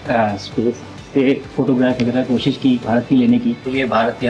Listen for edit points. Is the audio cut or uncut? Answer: uncut